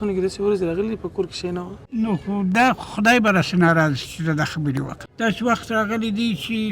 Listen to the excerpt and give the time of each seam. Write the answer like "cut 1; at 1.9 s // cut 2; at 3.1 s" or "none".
cut 1; at 1.8 s // cut 2; at 5.0 s